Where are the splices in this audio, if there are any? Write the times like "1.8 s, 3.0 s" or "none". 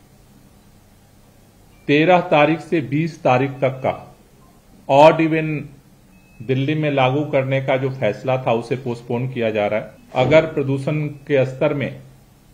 10.0 s